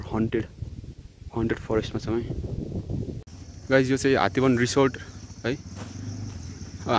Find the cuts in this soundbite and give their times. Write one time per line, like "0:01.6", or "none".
0:03.2